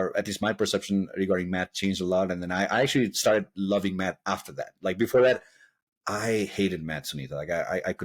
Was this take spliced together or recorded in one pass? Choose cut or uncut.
uncut